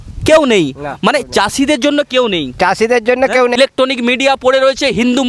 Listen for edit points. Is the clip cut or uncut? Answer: cut